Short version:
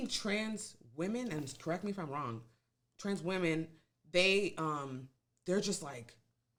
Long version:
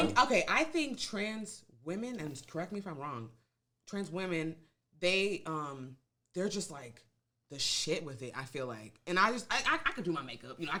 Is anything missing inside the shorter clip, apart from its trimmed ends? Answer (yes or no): no